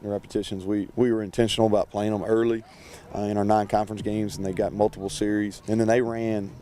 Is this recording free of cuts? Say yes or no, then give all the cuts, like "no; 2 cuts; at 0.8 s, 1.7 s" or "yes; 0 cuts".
no; 1 cut; at 5.6 s